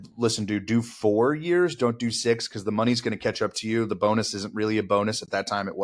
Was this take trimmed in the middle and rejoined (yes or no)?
no